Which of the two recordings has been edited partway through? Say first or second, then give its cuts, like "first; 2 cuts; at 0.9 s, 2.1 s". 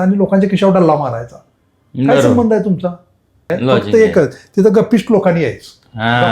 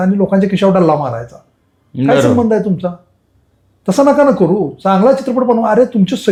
first; 1 cut; at 3.4 s